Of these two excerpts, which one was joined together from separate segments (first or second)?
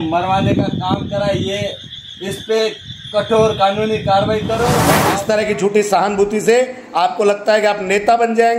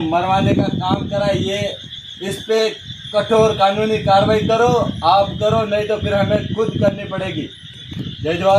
first